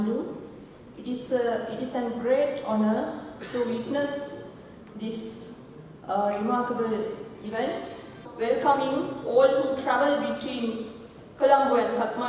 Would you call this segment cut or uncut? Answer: cut